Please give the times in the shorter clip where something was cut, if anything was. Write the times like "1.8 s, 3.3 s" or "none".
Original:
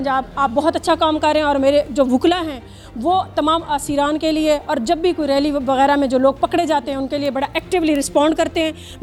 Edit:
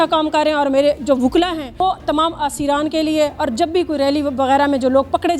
1.8 s